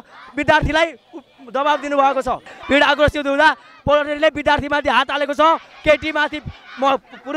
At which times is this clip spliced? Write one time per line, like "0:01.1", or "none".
0:02.5